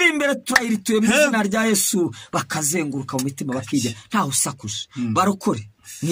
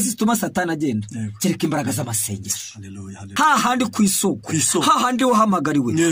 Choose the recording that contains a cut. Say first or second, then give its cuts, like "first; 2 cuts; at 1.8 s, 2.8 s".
second; 1 cut; at 3.3 s